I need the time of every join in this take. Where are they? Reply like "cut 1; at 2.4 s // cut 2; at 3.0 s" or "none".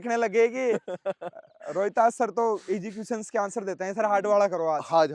none